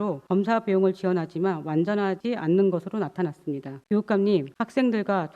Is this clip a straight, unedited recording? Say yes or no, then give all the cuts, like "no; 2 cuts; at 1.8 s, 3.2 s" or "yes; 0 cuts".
no; 1 cut; at 3.7 s